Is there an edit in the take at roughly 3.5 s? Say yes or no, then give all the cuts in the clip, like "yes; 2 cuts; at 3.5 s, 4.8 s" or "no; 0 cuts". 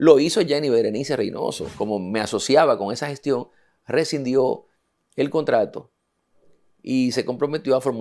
no; 1 cut; at 1.7 s